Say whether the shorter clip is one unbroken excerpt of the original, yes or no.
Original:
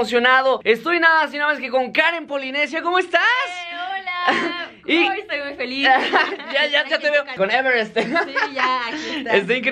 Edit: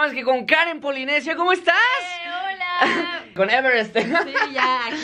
no